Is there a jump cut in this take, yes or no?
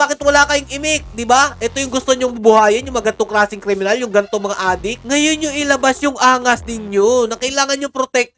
no